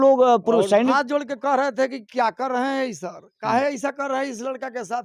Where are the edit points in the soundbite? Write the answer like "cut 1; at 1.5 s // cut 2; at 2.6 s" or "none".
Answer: cut 1; at 0.9 s